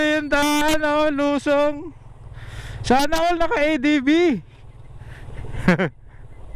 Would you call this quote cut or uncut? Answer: uncut